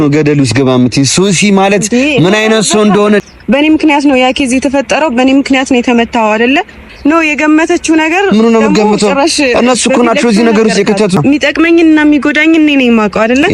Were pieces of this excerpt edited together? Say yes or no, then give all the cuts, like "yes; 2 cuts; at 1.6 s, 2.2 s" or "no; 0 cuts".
yes; 3 cuts; at 3.2 s, 6.9 s, 11.2 s